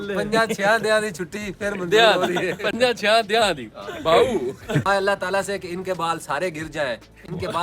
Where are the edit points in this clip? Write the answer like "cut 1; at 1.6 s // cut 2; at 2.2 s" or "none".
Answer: cut 1; at 4.9 s